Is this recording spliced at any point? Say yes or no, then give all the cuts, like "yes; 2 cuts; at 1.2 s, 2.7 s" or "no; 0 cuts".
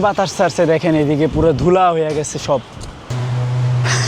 yes; 1 cut; at 3.1 s